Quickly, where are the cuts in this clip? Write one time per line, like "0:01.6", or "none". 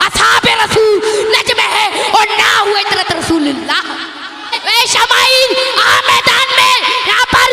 0:04.6